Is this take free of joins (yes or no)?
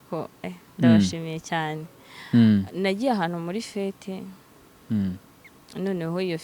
yes